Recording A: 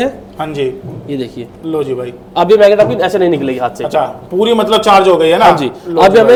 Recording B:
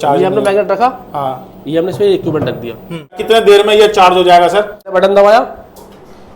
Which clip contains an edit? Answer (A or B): B